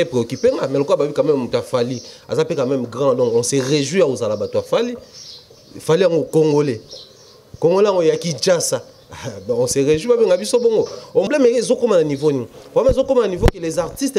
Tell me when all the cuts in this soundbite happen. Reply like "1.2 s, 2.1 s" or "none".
11.3 s